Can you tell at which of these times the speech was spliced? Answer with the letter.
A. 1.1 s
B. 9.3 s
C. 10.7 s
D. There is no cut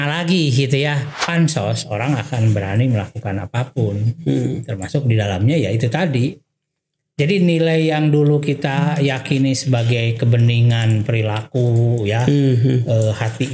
A